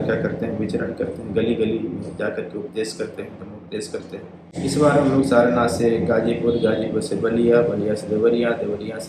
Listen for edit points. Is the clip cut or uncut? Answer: cut